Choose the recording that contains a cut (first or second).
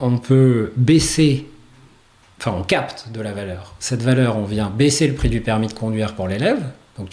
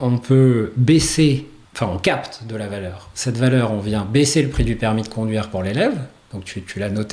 second